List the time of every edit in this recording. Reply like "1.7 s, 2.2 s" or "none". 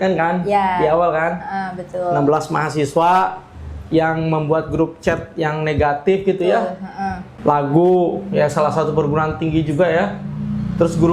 7.3 s